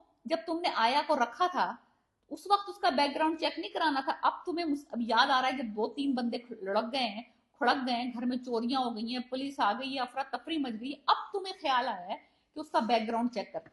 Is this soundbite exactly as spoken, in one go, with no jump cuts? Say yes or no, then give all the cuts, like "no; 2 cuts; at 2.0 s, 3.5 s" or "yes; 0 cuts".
yes; 0 cuts